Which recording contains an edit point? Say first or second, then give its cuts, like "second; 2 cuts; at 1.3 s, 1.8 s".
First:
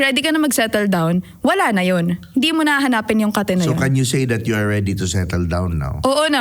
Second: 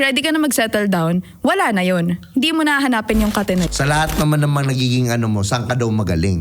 second; 1 cut; at 3.7 s